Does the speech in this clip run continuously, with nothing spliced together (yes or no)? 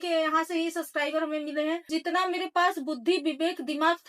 no